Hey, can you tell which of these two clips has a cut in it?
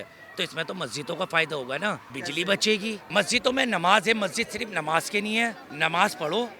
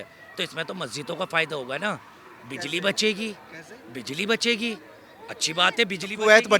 first; 3 cuts; at 2.1 s, 3.0 s, 5.7 s

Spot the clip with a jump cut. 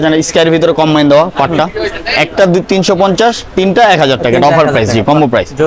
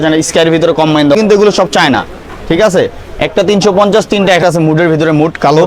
second; 2 cuts; at 1.2 s, 4.4 s

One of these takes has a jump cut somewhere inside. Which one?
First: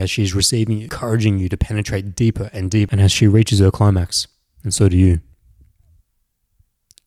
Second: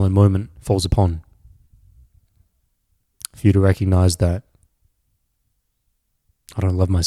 first; 2 cuts; at 0.9 s, 2.9 s

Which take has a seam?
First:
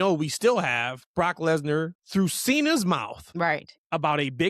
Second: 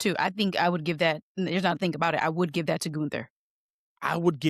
first; 3 cuts; at 1.0 s, 2.0 s, 3.2 s

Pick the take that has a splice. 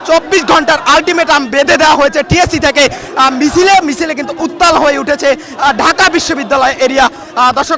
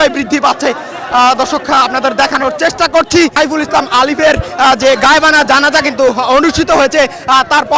second; 1 cut; at 3.3 s

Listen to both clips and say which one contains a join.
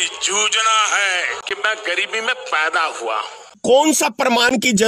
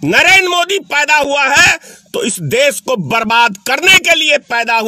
first; 2 cuts; at 1.4 s, 3.6 s

